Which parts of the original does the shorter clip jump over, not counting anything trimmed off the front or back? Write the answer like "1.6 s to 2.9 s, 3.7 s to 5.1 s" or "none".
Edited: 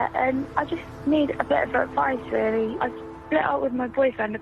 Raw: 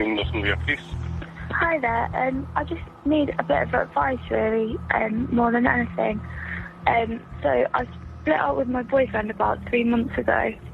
4.8 s to 7.7 s